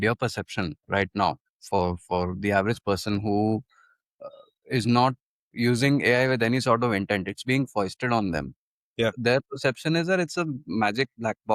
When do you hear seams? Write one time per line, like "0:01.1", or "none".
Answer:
none